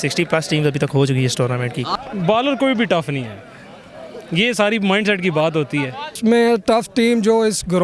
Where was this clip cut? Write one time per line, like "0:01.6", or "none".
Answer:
0:01.9
0:06.2